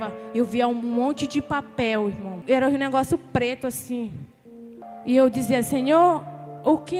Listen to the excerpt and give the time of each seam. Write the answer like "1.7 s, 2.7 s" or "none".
2.4 s, 4.9 s